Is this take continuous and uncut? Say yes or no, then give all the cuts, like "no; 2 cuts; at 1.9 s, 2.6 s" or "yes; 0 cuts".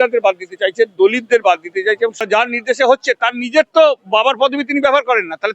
no; 1 cut; at 2.2 s